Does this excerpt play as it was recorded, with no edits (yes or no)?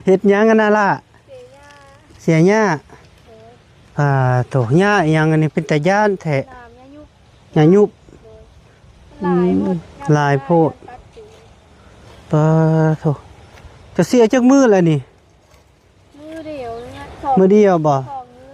yes